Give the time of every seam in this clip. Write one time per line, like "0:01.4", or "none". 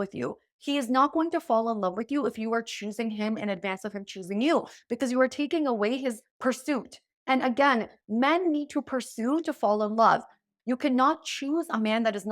0:10.5